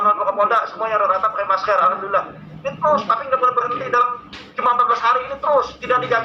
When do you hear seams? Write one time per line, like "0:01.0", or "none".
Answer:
none